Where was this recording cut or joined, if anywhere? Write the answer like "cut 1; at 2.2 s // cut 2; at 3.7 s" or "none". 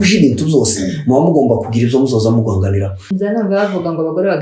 cut 1; at 3.1 s